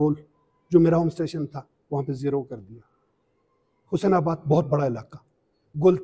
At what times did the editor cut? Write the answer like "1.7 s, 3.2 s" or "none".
none